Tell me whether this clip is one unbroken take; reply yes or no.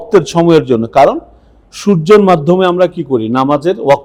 yes